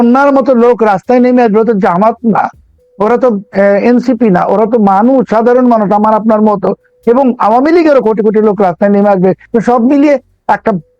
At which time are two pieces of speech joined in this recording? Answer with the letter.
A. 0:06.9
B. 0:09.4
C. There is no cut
B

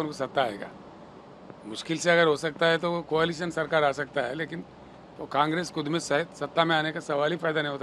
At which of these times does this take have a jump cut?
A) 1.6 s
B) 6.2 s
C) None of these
C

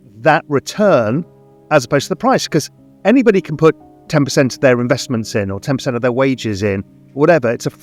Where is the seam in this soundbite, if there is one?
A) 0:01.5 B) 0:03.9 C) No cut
C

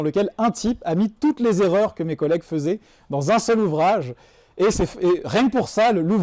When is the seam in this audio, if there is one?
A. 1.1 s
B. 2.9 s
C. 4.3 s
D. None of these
D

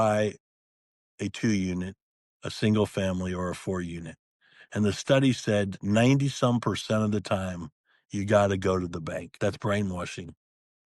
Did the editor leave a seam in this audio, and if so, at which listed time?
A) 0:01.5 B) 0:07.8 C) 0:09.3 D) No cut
C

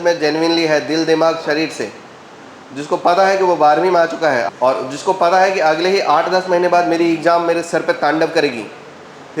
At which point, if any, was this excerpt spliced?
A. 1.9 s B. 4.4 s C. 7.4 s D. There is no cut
B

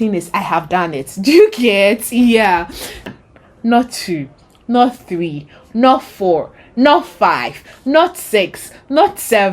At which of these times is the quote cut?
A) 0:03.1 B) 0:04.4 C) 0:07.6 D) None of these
A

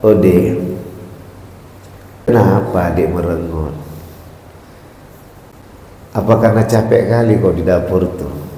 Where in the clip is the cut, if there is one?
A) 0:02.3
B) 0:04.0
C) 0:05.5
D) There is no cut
A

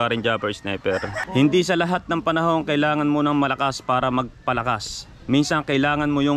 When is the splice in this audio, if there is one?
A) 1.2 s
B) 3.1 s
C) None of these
A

